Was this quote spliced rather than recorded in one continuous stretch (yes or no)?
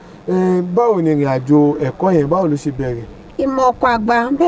no